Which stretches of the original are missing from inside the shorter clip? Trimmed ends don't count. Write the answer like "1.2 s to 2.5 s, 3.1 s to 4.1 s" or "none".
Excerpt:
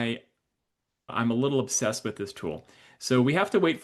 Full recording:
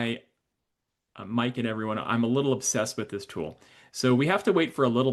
1.1 s to 2.0 s